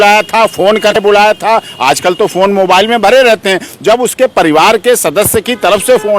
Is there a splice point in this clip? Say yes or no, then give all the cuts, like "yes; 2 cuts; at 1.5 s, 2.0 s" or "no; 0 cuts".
yes; 1 cut; at 1.0 s